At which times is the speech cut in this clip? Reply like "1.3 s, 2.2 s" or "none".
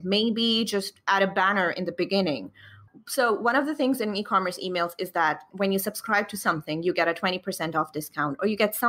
5.5 s